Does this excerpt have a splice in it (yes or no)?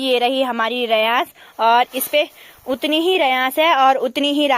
no